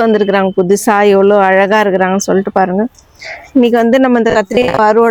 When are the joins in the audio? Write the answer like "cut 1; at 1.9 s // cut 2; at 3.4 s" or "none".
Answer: none